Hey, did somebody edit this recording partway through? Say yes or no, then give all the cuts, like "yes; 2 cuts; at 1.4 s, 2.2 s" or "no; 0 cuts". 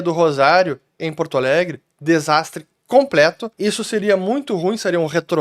no; 0 cuts